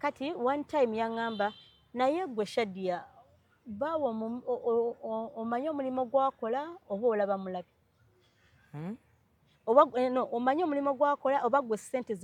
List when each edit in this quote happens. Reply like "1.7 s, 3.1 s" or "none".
none